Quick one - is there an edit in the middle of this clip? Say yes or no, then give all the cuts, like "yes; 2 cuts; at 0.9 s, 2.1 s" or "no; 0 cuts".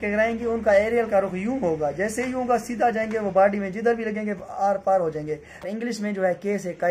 yes; 1 cut; at 5.7 s